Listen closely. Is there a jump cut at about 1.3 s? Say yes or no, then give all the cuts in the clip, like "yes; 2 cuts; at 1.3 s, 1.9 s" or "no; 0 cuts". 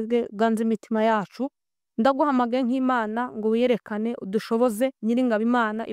no; 1 cut; at 5.0 s